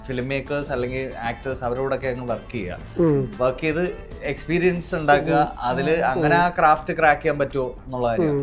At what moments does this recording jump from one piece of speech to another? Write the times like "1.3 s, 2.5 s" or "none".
none